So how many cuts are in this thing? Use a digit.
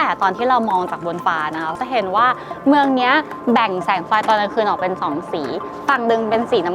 1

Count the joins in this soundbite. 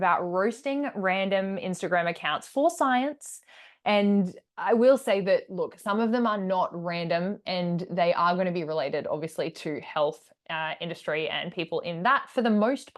0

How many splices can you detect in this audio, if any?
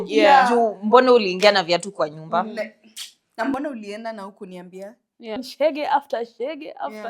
1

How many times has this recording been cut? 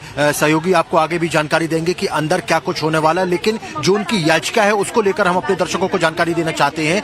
0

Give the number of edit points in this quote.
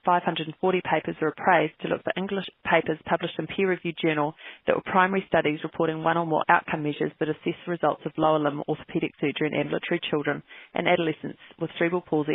1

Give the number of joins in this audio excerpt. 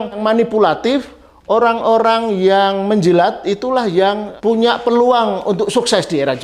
0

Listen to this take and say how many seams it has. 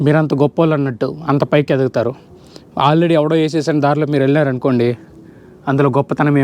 0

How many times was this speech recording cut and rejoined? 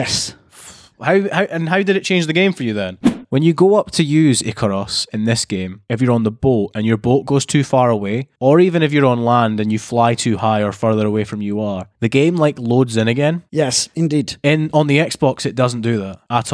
1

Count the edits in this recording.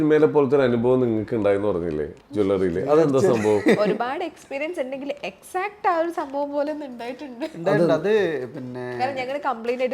0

